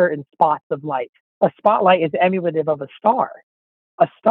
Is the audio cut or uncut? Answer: cut